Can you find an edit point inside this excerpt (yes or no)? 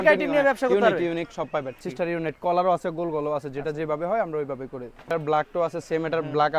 yes